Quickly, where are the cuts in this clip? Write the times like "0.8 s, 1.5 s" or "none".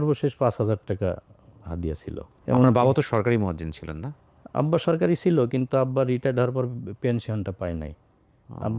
none